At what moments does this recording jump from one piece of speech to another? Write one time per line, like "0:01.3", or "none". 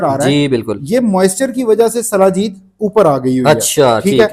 none